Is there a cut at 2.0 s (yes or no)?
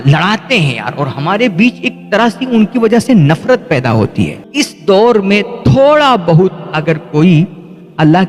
no